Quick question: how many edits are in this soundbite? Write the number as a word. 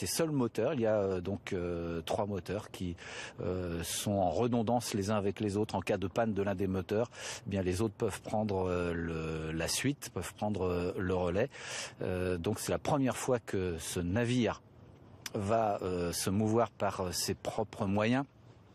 zero